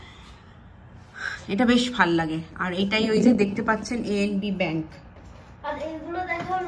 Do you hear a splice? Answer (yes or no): no